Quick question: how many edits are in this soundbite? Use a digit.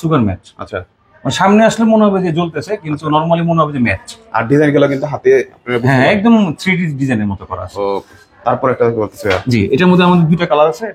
0